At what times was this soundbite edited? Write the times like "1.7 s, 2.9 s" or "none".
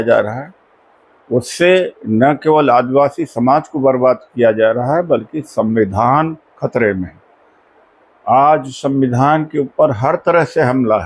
none